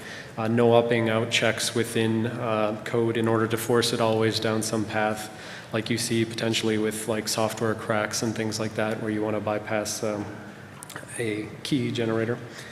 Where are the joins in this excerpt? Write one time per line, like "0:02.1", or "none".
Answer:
0:07.7